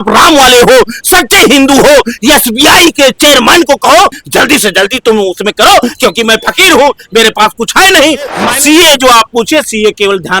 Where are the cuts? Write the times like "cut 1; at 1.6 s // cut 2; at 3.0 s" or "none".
cut 1; at 4.2 s // cut 2; at 8.5 s